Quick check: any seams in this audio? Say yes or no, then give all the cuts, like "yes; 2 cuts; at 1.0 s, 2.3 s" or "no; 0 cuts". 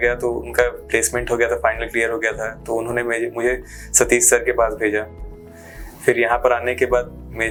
no; 0 cuts